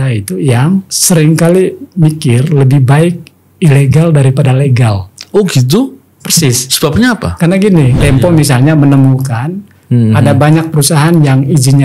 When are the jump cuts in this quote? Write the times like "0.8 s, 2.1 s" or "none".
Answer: 0.9 s, 8.0 s